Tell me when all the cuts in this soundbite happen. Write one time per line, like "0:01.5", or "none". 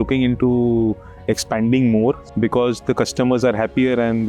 0:02.3